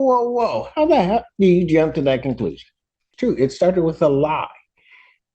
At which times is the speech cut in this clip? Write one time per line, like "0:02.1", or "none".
0:03.0